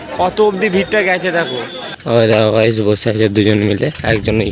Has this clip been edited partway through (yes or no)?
yes